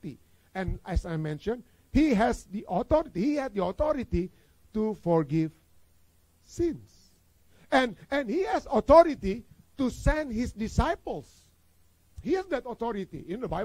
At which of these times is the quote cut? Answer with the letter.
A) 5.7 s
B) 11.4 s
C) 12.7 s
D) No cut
D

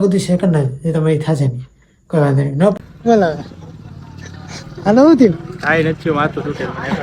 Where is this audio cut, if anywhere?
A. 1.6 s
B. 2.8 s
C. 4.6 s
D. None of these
B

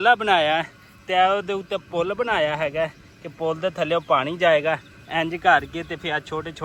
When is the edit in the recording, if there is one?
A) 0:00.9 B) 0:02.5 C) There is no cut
C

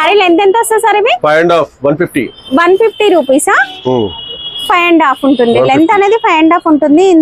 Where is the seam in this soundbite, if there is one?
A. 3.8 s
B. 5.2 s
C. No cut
C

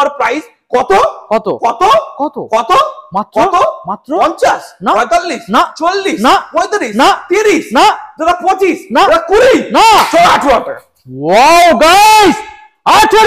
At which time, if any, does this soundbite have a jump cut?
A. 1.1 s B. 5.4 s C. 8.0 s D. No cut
D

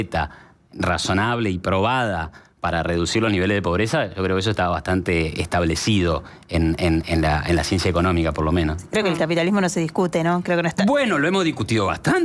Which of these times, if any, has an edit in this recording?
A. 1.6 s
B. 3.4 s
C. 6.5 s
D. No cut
D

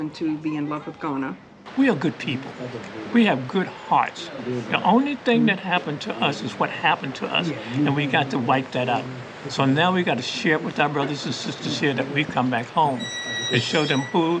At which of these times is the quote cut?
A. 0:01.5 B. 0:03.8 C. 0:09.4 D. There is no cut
A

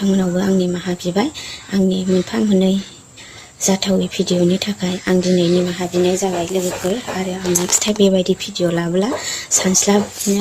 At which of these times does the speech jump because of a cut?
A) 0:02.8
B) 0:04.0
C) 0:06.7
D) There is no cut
D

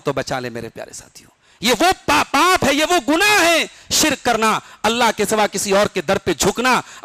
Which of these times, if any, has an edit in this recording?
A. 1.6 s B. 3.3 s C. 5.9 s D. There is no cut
D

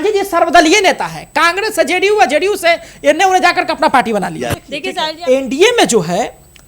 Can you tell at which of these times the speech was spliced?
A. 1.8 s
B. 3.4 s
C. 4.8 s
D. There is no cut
C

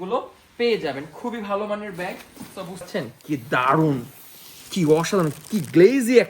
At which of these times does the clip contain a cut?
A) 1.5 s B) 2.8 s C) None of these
B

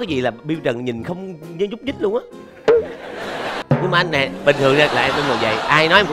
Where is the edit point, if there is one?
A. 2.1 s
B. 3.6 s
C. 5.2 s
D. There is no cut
B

